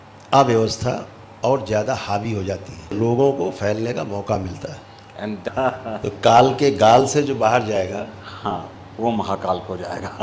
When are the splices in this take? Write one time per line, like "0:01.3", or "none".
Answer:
0:02.9
0:05.4

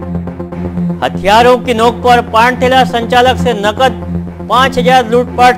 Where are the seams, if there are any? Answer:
0:01.0

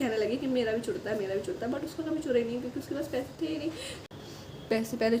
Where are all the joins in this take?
0:03.9

